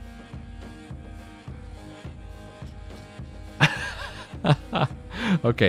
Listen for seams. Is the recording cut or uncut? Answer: uncut